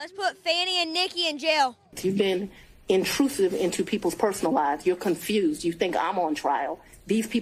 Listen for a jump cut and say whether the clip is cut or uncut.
cut